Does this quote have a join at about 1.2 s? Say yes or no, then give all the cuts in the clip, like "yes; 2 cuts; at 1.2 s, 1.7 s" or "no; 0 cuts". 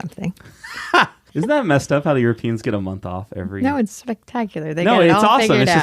yes; 1 cut; at 1.2 s